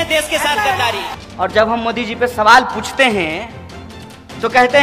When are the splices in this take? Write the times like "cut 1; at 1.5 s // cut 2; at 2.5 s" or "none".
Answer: cut 1; at 1.2 s